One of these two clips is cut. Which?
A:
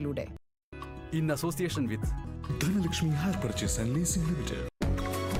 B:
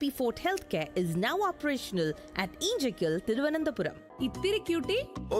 B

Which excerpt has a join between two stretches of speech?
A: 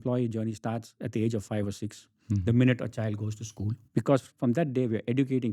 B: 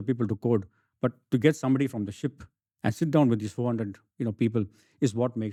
A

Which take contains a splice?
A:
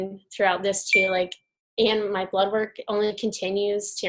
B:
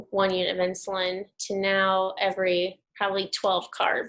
B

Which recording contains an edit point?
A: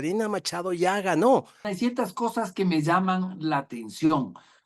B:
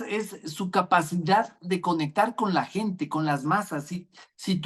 A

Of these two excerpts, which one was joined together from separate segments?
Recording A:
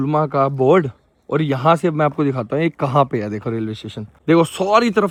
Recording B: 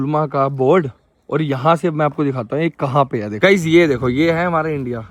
B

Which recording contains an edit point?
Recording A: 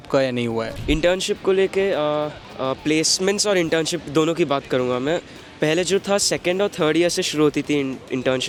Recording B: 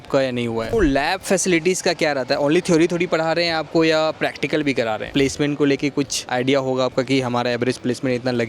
B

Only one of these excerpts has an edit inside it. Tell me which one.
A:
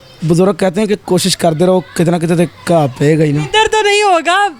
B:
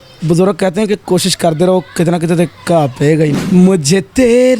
B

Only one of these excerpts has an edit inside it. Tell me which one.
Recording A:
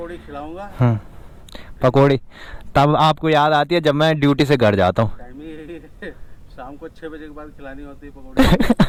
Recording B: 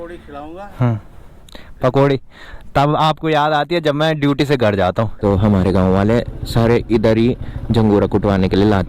B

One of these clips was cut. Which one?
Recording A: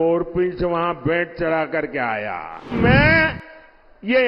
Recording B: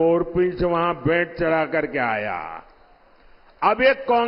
A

